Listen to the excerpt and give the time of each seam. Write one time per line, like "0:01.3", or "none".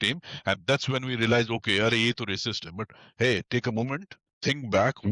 none